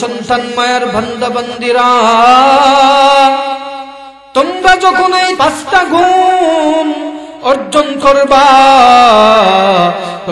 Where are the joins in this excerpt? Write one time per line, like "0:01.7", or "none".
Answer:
0:05.3